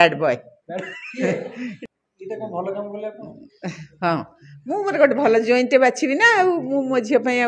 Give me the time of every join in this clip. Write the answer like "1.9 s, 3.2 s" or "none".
1.8 s